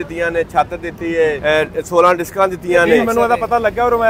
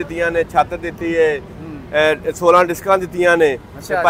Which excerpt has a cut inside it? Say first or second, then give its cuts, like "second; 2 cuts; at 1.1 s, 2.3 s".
first; 2 cuts; at 1.4 s, 3.0 s